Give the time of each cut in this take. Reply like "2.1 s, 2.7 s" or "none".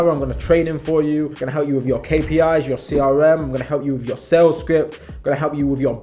1.4 s